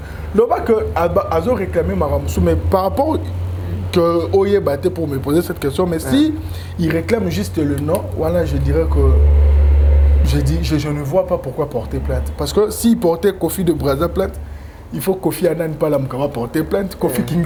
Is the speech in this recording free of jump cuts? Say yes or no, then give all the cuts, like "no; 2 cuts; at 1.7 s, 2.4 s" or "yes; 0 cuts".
yes; 0 cuts